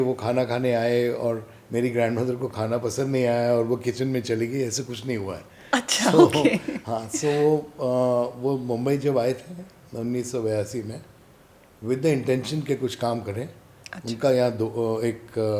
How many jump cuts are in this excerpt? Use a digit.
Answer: 0